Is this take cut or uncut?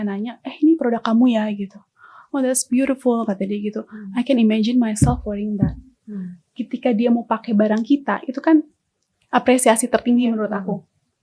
uncut